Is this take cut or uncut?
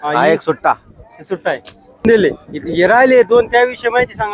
cut